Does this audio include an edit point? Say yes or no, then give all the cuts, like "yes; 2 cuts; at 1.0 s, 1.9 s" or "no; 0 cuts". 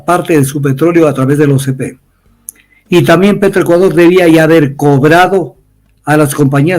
no; 0 cuts